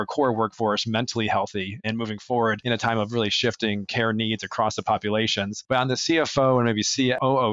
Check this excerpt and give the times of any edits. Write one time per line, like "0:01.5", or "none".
none